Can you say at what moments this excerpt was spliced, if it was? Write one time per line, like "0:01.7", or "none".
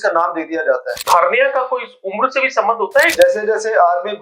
0:01.1
0:03.1